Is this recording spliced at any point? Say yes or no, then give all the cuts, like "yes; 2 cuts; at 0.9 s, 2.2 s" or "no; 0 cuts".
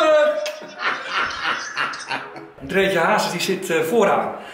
yes; 1 cut; at 2.6 s